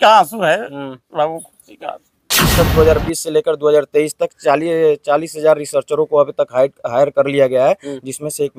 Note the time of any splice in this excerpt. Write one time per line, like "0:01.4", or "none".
0:02.5